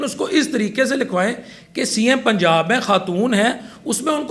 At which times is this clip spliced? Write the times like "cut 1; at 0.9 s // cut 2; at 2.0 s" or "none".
none

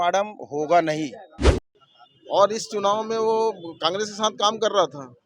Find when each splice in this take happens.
cut 1; at 1.5 s

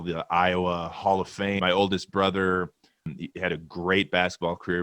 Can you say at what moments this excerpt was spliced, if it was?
cut 1; at 1.6 s // cut 2; at 3.1 s

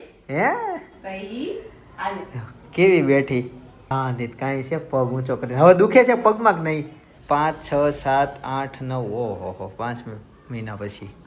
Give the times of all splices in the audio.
cut 1; at 7.1 s

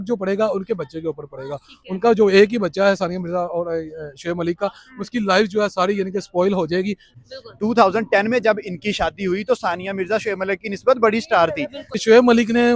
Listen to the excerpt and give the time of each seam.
cut 1; at 7.0 s // cut 2; at 11.9 s

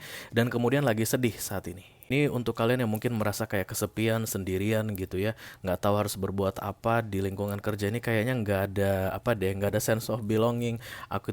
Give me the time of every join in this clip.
cut 1; at 2.1 s

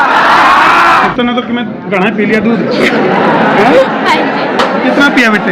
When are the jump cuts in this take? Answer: cut 1; at 0.9 s

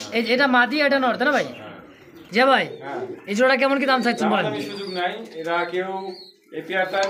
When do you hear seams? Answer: cut 1; at 2.1 s

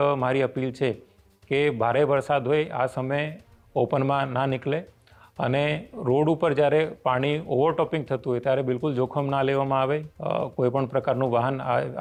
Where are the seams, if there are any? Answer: none

